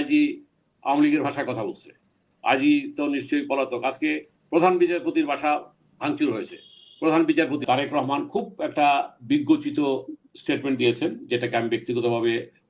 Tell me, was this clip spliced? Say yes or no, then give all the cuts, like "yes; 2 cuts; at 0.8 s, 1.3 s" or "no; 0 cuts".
yes; 1 cut; at 7.6 s